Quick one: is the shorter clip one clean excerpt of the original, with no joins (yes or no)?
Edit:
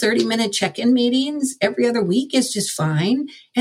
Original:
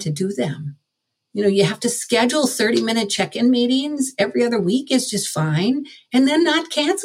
yes